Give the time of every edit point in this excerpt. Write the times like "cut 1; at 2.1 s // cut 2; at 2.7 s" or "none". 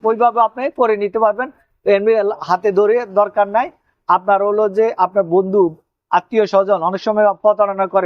none